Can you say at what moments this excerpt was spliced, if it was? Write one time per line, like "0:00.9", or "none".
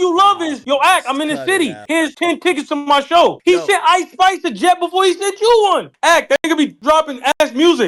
0:01.9
0:03.4
0:05.9